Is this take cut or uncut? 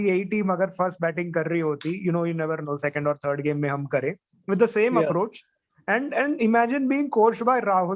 uncut